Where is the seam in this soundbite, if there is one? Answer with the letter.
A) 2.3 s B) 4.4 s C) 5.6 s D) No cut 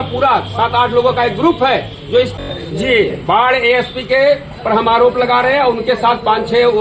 A